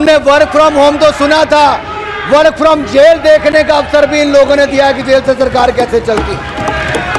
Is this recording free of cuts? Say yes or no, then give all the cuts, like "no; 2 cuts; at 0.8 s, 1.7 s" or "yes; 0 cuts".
yes; 0 cuts